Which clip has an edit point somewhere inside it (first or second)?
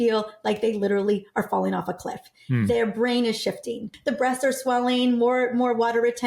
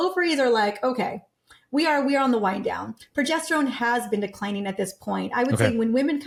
first